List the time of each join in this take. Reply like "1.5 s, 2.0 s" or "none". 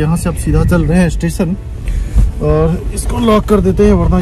none